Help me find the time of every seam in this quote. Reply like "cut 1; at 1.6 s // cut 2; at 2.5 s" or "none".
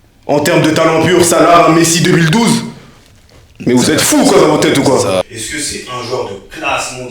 cut 1; at 5.2 s

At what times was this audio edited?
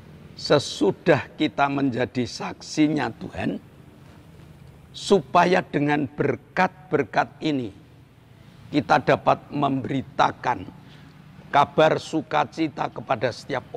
none

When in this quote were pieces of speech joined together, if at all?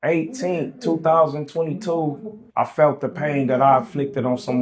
cut 1; at 2.3 s

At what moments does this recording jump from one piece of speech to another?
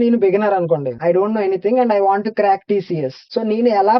cut 1; at 0.9 s

